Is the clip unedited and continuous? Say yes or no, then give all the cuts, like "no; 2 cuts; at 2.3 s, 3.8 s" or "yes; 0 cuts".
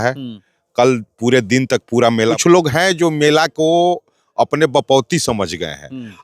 no; 1 cut; at 2.4 s